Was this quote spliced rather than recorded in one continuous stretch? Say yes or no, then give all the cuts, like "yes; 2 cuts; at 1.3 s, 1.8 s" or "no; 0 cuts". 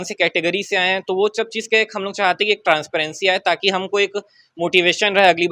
no; 0 cuts